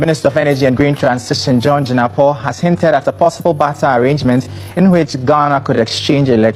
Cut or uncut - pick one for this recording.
uncut